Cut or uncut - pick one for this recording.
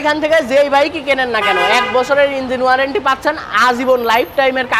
uncut